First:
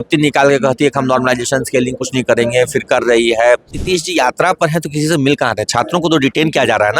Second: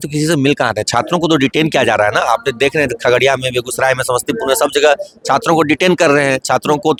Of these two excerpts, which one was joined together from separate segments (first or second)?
first